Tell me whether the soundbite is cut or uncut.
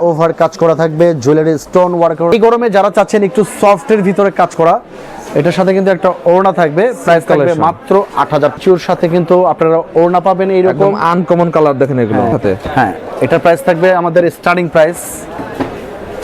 cut